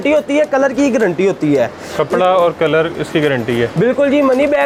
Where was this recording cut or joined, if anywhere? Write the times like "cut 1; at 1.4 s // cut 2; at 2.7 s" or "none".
none